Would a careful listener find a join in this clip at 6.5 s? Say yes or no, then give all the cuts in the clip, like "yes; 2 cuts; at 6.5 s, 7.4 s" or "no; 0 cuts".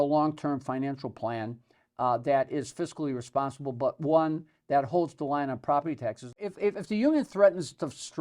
yes; 1 cut; at 6.5 s